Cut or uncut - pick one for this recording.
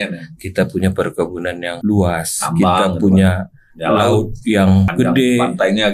cut